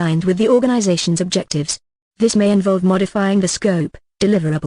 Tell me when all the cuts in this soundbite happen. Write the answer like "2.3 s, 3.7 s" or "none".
1.5 s

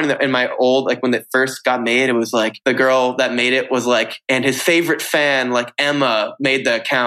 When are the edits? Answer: 2.6 s, 4.2 s

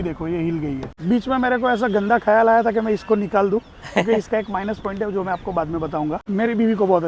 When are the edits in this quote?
0.9 s, 6.2 s

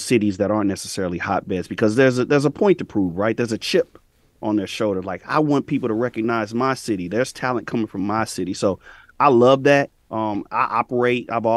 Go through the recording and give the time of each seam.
none

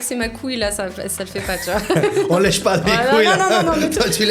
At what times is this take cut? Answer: none

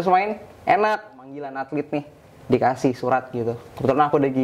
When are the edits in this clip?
1.4 s

